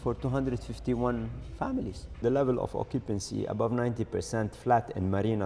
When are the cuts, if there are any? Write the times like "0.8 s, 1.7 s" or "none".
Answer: 2.2 s